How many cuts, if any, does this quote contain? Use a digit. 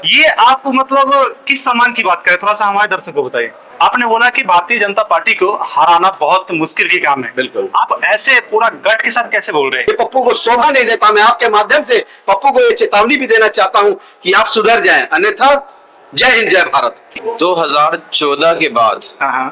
3